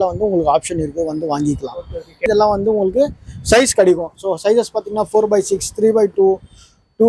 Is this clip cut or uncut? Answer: cut